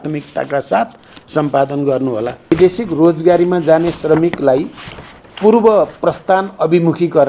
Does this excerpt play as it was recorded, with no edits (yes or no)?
no